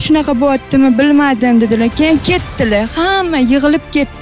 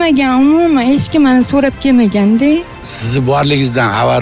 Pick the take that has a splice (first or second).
second